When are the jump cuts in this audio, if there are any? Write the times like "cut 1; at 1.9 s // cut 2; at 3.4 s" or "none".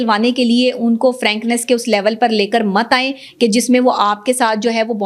none

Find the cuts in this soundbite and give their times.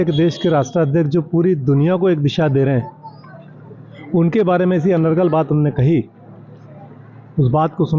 none

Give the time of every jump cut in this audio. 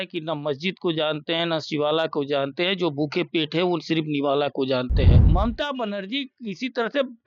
cut 1; at 5.2 s

